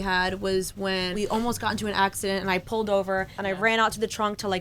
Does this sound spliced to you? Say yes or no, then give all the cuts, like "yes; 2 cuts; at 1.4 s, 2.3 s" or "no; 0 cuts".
yes; 2 cuts; at 1.1 s, 3.4 s